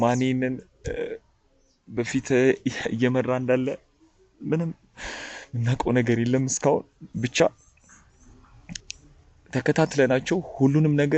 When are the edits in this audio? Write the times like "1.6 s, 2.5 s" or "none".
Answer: none